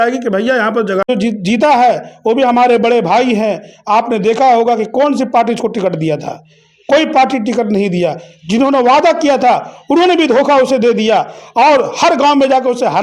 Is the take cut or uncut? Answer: cut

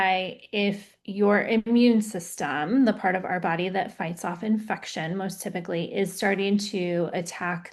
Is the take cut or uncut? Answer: uncut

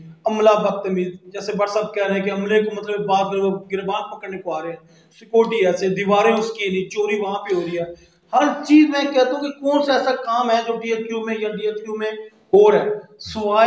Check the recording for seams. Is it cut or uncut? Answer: uncut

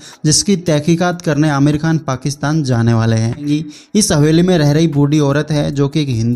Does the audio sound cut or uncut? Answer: cut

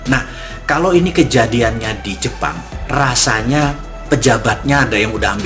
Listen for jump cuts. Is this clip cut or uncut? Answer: uncut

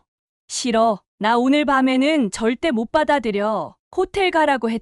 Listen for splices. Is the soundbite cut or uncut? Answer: uncut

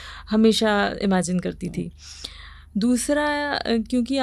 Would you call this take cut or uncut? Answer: uncut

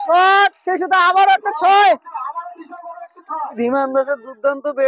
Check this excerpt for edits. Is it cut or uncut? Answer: cut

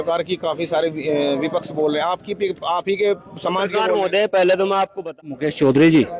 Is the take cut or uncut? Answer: cut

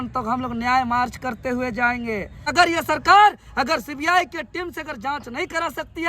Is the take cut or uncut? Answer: cut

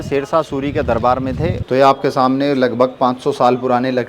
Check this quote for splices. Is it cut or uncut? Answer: cut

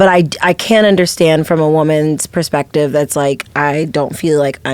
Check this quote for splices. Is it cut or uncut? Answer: uncut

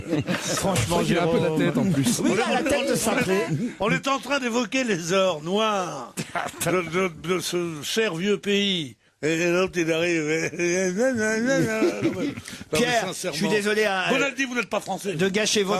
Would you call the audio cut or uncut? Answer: cut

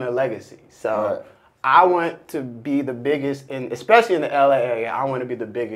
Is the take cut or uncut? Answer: uncut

